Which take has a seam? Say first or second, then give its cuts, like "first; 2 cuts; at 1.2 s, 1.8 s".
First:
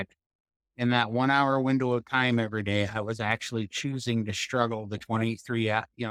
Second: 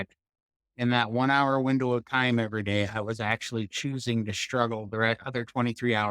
second; 1 cut; at 4.9 s